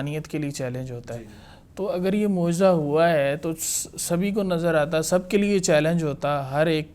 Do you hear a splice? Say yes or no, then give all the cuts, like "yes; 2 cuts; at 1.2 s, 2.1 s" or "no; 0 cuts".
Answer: no; 0 cuts